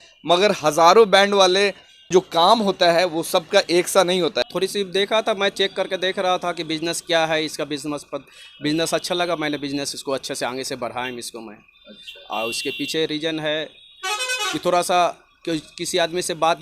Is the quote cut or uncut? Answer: cut